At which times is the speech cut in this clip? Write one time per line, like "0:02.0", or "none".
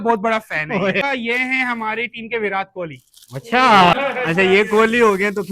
0:01.0
0:04.0